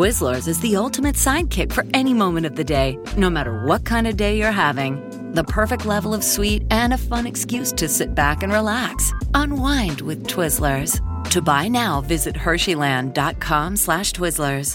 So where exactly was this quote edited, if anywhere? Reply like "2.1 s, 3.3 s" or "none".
none